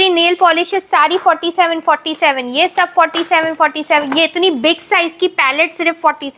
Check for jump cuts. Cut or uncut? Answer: uncut